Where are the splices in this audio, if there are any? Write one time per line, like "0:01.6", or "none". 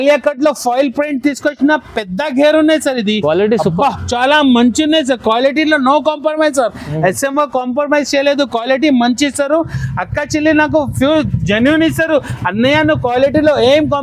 none

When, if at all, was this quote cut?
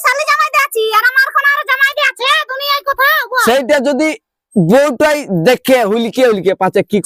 none

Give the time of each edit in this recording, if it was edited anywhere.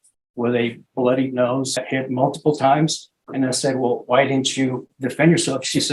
0:01.8

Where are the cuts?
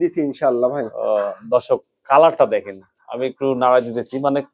none

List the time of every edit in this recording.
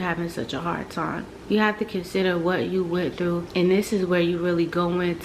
0:01.3

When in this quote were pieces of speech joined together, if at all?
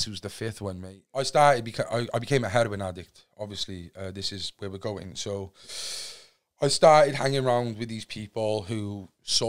0:00.9

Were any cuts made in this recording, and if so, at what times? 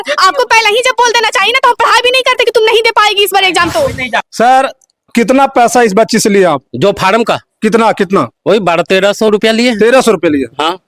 0:04.3

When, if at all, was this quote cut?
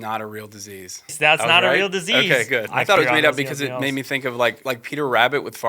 0:01.1
0:03.0
0:04.6

